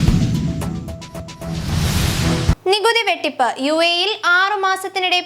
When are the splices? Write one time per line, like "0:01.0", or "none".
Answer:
0:01.4